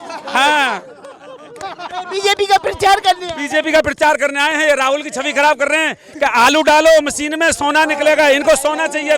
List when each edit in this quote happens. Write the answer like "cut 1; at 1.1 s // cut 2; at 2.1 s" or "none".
none